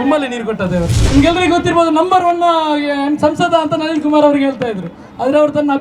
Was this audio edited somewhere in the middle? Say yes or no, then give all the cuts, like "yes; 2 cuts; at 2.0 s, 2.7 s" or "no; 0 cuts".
yes; 1 cut; at 0.9 s